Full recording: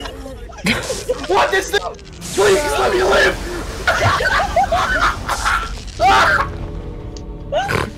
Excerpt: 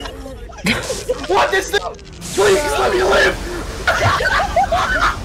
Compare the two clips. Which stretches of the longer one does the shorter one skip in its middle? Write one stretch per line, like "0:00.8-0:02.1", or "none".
none